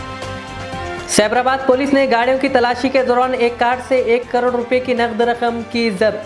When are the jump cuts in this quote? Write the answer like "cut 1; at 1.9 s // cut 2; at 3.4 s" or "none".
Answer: cut 1; at 1.0 s